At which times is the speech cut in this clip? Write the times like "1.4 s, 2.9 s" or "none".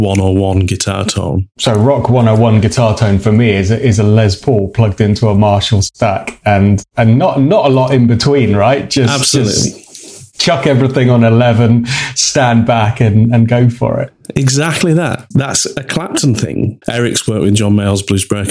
15.2 s, 16.8 s